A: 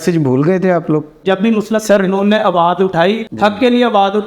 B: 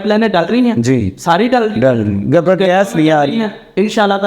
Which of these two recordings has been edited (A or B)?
A